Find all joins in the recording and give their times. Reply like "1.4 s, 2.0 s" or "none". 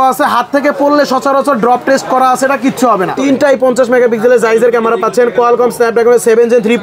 3.1 s